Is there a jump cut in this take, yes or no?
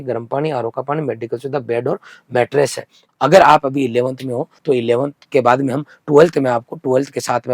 yes